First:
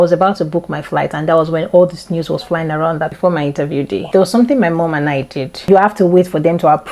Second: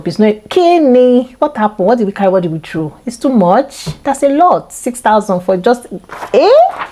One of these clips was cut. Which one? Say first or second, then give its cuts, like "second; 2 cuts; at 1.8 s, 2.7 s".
first; 2 cuts; at 3.1 s, 5.6 s